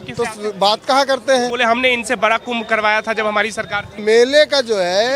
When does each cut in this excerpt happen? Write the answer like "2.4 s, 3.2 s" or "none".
1.5 s, 3.9 s